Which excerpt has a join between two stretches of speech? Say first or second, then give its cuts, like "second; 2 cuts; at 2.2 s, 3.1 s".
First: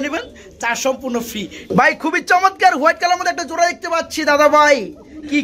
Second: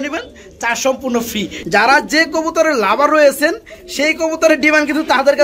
second; 1 cut; at 1.5 s